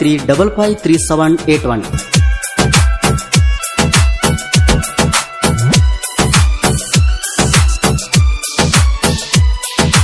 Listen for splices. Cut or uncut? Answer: cut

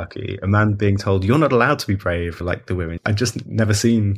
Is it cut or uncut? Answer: cut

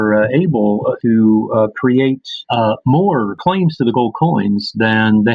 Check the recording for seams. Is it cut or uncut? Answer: cut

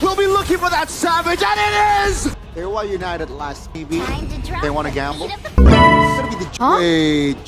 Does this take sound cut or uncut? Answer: cut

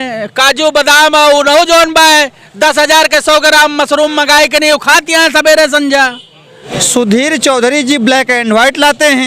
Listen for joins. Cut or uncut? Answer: cut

